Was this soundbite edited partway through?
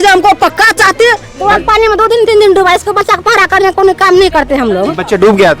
yes; 1 cut; at 1.3 s

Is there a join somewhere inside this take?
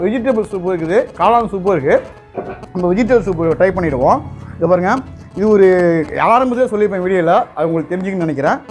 no; 0 cuts

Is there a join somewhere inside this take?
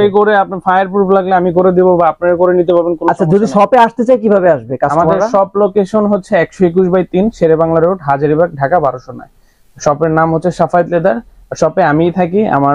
no; 0 cuts

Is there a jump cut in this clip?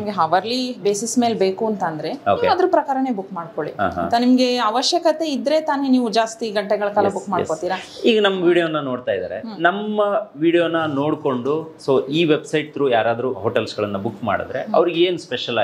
no; 0 cuts

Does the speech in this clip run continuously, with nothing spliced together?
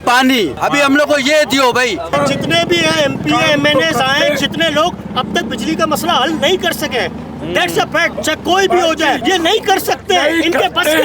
yes; 0 cuts

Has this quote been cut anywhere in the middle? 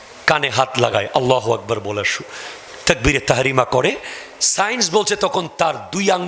no; 0 cuts

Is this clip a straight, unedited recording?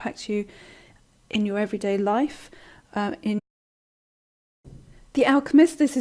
yes; 0 cuts

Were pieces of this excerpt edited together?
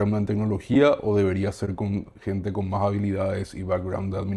no; 0 cuts

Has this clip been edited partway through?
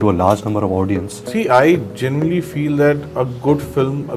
yes; 1 cut; at 1.2 s

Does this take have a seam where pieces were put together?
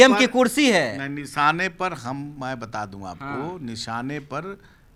no; 0 cuts

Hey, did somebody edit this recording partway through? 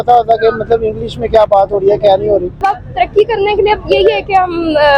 yes; 1 cut; at 2.7 s

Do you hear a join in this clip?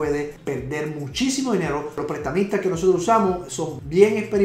yes; 1 cut; at 1.9 s

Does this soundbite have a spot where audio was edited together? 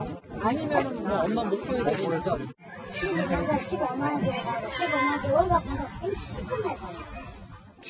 no; 0 cuts

